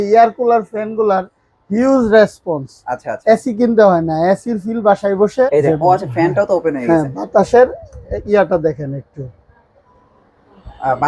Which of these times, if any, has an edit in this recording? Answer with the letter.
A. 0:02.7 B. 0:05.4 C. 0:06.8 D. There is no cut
B